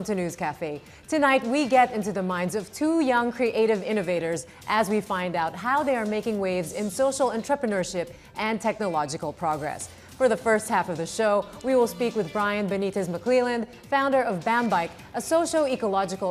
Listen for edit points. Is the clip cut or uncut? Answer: uncut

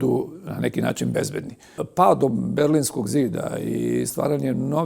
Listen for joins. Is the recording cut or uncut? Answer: cut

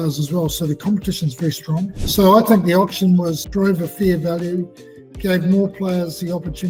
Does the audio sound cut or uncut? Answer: uncut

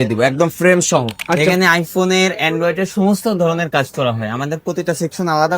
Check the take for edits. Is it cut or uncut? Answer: cut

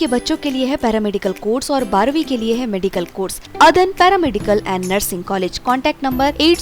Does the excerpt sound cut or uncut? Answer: cut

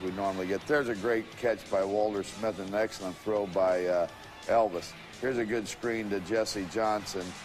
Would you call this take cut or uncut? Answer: uncut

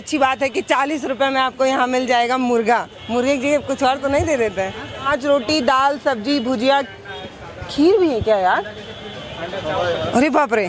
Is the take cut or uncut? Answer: cut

